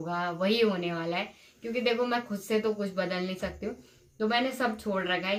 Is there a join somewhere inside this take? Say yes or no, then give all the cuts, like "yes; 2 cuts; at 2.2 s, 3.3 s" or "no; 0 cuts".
no; 0 cuts